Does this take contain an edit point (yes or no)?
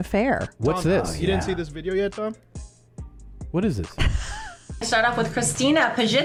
no